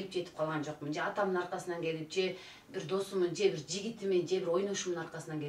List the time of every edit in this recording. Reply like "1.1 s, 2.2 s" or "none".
none